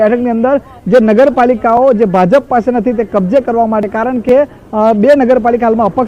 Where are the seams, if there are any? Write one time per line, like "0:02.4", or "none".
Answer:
none